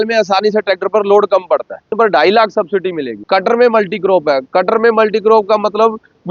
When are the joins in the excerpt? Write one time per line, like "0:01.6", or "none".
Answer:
0:01.9
0:03.1